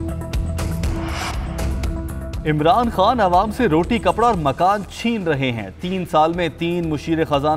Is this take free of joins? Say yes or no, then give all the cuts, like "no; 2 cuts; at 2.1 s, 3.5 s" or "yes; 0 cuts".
no; 1 cut; at 0.9 s